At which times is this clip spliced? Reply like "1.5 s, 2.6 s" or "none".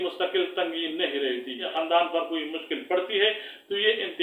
1.7 s